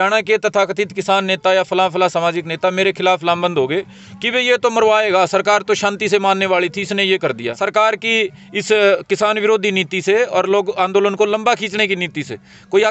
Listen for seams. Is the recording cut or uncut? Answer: cut